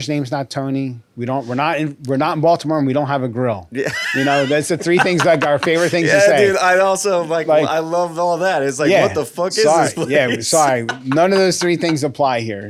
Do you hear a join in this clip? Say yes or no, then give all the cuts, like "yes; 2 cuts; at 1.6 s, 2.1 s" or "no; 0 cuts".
no; 0 cuts